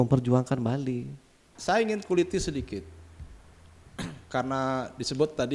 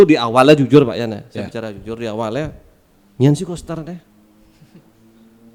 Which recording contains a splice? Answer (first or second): first